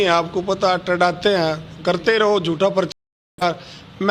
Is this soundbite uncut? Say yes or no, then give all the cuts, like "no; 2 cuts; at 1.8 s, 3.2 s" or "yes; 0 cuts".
yes; 0 cuts